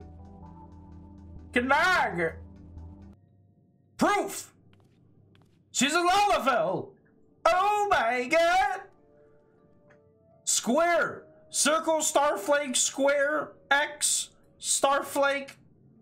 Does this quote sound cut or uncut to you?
cut